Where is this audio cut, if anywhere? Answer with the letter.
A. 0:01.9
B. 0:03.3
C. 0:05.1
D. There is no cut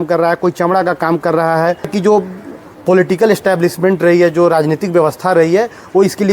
A